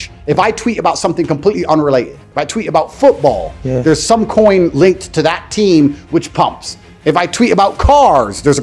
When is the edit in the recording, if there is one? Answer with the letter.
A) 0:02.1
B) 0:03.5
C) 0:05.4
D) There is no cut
D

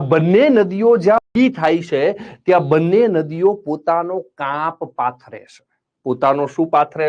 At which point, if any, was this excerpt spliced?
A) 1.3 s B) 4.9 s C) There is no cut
A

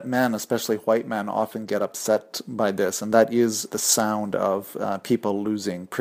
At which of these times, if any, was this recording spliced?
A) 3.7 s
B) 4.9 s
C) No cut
A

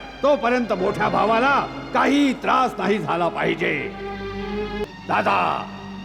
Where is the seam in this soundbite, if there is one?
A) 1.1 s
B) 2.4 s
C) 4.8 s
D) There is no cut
C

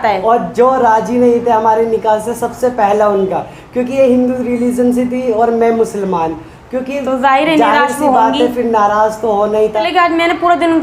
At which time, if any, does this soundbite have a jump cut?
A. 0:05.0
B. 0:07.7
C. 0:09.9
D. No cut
C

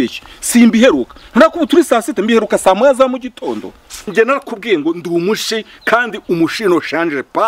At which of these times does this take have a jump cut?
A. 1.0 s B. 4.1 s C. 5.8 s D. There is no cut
B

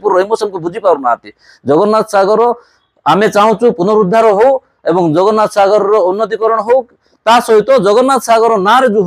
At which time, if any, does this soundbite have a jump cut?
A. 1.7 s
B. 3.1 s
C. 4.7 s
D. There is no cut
D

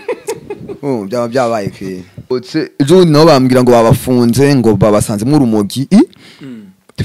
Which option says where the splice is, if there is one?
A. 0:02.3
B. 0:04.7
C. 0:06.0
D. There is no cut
A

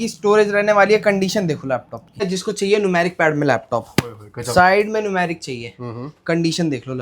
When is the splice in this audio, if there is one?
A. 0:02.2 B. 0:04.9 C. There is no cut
A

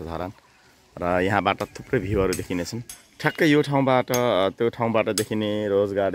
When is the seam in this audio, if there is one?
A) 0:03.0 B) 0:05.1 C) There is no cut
C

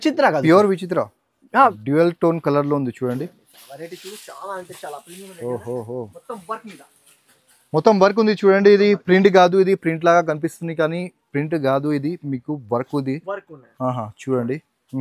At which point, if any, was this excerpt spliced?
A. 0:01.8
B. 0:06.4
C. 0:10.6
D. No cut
A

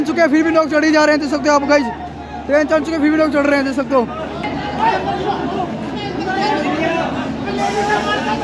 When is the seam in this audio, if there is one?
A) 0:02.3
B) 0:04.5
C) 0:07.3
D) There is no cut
B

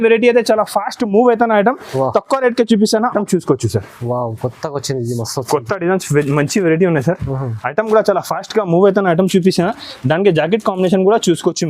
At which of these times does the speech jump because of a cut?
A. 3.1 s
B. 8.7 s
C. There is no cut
A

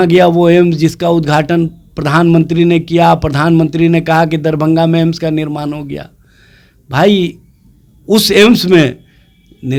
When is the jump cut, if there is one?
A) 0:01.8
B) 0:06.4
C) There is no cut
C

